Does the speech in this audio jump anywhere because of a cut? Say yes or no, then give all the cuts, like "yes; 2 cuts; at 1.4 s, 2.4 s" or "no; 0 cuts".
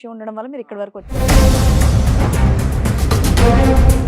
yes; 1 cut; at 1.1 s